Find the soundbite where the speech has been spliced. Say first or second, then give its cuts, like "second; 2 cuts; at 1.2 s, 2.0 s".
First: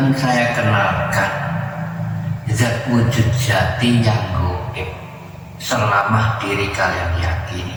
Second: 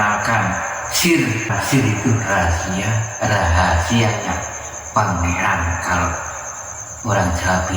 second; 1 cut; at 1.5 s